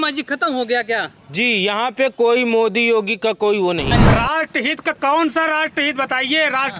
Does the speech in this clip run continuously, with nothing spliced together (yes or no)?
no